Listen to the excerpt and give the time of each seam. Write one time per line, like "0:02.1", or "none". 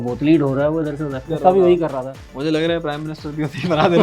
0:01.3